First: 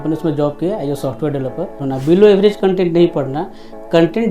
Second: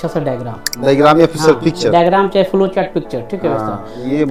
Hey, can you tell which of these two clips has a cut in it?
first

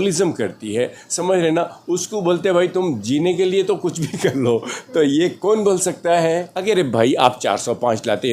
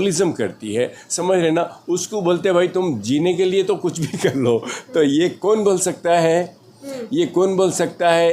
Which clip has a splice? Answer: first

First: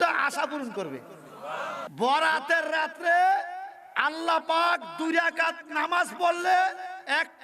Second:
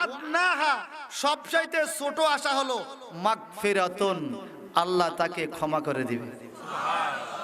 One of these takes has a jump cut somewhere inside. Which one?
first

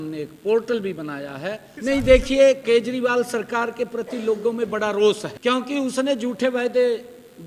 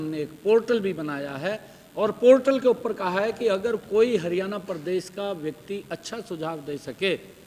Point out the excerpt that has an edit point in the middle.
first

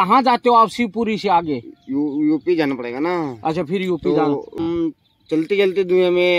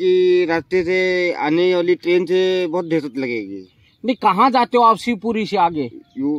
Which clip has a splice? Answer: first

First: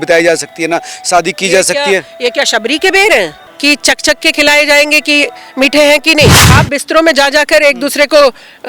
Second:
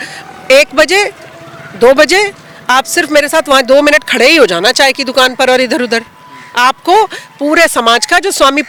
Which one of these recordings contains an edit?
first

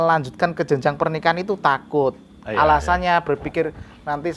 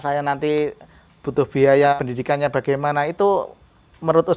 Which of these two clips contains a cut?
second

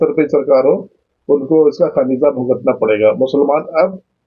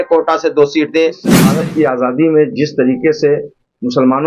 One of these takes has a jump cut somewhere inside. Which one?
second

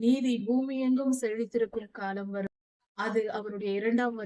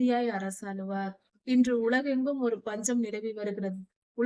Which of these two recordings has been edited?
first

